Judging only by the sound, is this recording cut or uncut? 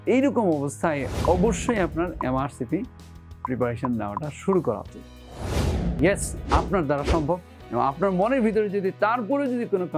cut